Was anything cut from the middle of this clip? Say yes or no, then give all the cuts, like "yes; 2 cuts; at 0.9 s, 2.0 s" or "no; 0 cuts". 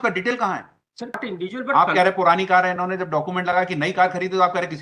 yes; 1 cut; at 1.2 s